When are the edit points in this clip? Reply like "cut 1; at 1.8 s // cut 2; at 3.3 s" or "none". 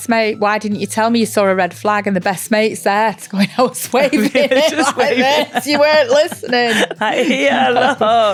none